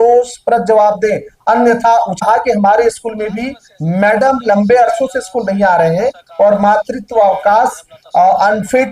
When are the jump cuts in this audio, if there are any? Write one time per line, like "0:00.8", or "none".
0:02.2

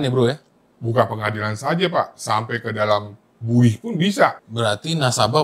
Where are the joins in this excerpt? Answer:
0:04.4

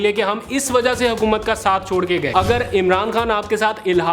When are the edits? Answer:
0:02.3

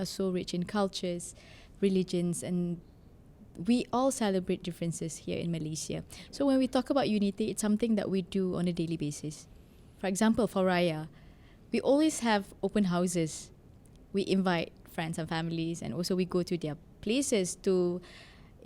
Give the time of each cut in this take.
none

